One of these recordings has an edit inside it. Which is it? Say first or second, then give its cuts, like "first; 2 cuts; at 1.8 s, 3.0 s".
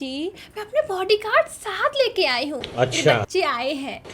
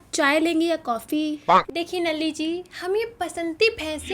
second; 1 cut; at 1.5 s